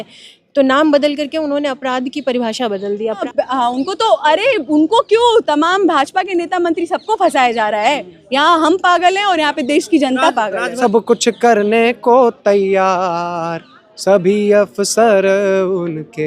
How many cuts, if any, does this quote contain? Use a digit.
2